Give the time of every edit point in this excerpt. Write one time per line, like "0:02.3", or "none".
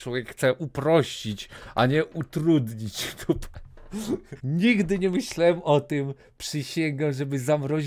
0:04.3

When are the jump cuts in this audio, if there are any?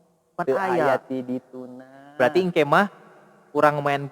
none

